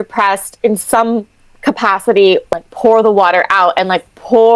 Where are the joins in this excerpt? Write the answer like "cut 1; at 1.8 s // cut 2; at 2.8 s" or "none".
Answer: cut 1; at 2.5 s

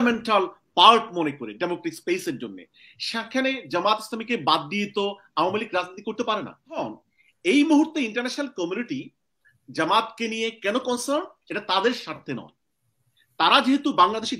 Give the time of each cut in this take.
cut 1; at 6.8 s

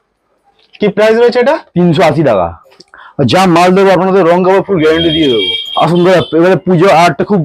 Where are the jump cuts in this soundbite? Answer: cut 1; at 2.6 s // cut 2; at 5.6 s

